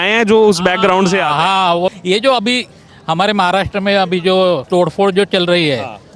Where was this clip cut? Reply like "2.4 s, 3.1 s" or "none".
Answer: 1.9 s, 4.6 s